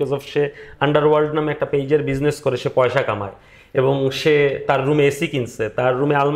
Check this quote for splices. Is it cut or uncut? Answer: uncut